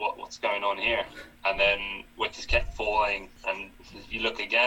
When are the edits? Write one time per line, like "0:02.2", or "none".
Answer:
0:03.5